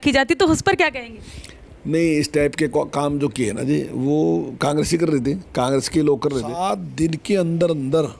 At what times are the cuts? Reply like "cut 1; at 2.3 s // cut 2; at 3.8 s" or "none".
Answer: cut 1; at 6.6 s